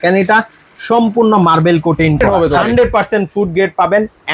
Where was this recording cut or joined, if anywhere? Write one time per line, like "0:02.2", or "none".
0:02.2